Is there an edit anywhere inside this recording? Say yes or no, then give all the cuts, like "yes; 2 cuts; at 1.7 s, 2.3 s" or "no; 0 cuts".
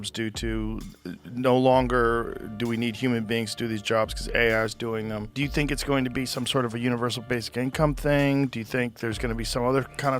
yes; 1 cut; at 5.3 s